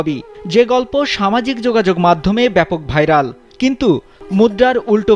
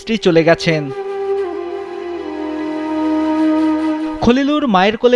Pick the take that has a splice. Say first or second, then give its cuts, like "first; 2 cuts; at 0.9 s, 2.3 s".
first; 1 cut; at 4.1 s